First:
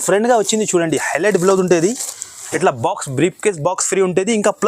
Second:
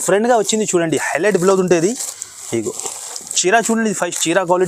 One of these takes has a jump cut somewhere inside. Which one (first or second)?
first